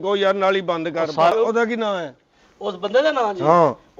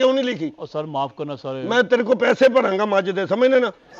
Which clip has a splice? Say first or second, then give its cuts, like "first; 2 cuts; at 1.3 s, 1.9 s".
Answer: first; 1 cut; at 1.3 s